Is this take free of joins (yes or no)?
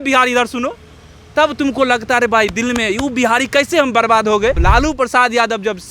no